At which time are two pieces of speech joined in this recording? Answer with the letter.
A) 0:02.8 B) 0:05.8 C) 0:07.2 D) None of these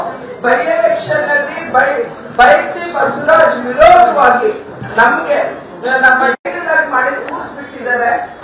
A